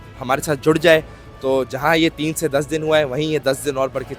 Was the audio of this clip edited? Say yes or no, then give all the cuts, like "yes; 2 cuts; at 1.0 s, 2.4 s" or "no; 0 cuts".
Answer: no; 0 cuts